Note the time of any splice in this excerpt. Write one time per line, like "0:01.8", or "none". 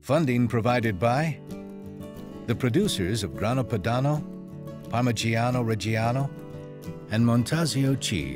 0:01.5